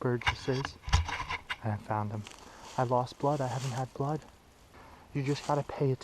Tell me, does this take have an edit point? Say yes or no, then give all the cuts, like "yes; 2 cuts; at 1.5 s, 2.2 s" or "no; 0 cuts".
yes; 2 cuts; at 2.5 s, 4.9 s